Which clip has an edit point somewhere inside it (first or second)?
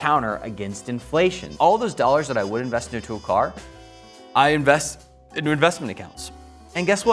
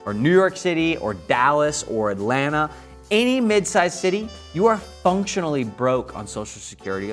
first